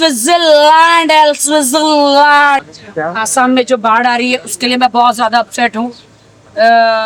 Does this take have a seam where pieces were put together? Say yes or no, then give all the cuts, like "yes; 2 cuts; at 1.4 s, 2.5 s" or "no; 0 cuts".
yes; 1 cut; at 2.8 s